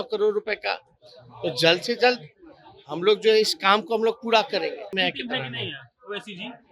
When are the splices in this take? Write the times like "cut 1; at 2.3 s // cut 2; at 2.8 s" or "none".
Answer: cut 1; at 4.9 s